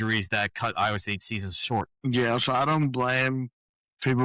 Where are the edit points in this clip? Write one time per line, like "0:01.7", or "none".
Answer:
none